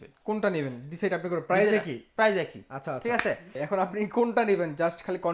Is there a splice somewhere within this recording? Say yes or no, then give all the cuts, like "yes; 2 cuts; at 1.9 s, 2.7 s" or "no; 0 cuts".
yes; 1 cut; at 3.5 s